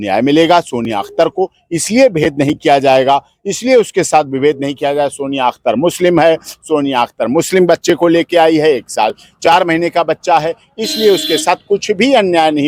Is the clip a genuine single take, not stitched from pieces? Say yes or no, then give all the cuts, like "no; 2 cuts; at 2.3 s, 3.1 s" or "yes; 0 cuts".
yes; 0 cuts